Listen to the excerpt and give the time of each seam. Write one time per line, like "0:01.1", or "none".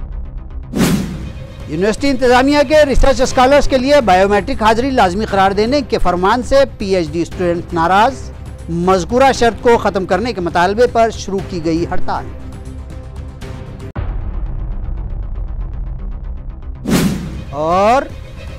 none